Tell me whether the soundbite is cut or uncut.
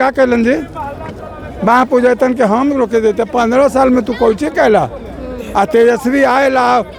uncut